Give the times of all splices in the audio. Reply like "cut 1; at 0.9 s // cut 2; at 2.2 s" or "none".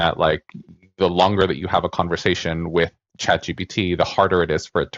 none